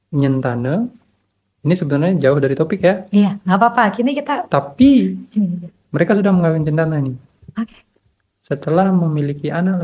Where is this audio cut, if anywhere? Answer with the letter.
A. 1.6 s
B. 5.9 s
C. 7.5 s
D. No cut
D